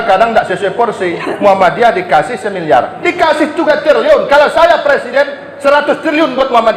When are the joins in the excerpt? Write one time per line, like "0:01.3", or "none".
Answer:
none